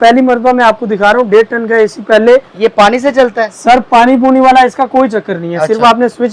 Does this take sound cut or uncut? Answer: uncut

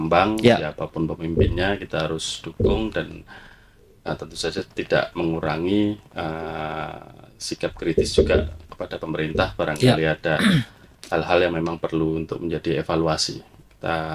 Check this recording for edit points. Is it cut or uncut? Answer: uncut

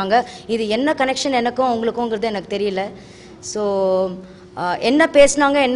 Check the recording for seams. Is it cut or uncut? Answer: uncut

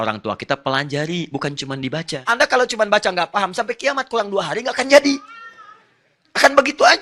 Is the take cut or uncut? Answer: cut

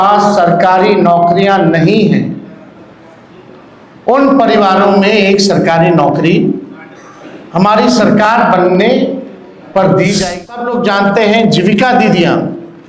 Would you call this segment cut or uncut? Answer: cut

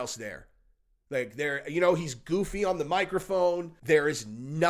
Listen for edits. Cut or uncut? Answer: cut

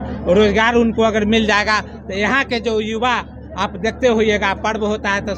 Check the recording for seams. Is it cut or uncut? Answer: uncut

